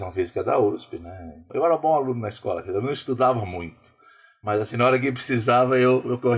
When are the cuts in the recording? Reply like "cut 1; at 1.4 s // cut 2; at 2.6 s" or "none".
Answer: cut 1; at 1.5 s